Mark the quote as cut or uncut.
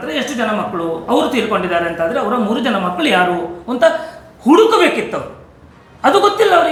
uncut